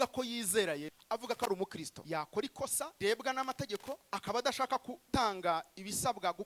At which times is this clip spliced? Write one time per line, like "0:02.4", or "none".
0:01.0
0:01.9
0:02.9
0:04.0
0:05.0